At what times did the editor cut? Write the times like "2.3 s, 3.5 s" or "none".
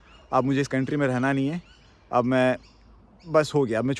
none